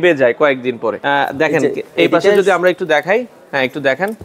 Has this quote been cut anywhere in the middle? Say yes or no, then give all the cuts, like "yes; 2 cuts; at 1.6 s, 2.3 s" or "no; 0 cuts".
yes; 1 cut; at 1.0 s